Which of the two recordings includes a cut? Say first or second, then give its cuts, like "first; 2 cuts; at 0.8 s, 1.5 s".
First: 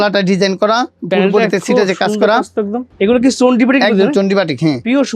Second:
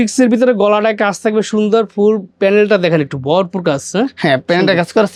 first; 1 cut; at 2.8 s